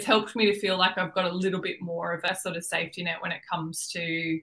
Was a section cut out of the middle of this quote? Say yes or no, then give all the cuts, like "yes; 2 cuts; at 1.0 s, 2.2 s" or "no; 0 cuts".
yes; 1 cut; at 2.3 s